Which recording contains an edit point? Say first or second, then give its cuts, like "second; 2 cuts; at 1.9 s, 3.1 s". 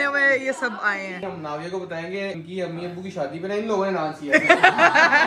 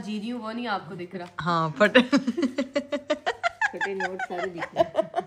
first; 2 cuts; at 1.2 s, 2.4 s